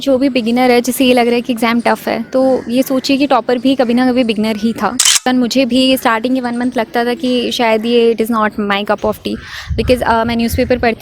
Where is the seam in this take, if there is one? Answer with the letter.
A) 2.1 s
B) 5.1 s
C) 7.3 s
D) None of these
B